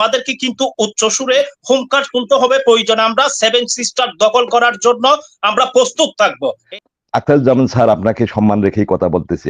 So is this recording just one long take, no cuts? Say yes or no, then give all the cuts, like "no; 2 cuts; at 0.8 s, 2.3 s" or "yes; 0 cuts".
no; 1 cut; at 6.7 s